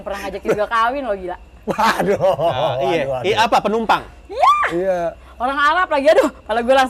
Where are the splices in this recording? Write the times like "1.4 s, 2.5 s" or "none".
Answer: none